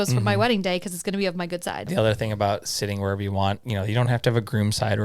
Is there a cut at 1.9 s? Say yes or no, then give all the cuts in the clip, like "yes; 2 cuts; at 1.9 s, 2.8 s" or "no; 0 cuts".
yes; 2 cuts; at 1.9 s, 3.6 s